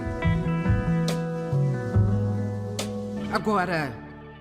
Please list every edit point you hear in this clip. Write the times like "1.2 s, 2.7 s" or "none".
3.3 s